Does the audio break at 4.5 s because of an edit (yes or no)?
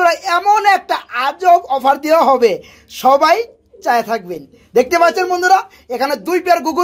no